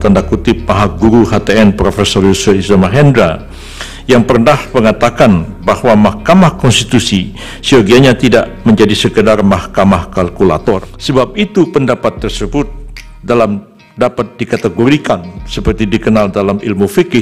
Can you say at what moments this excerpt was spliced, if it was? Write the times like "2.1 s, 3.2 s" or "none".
10.9 s